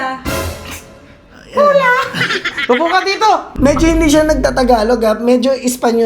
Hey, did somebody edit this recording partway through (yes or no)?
yes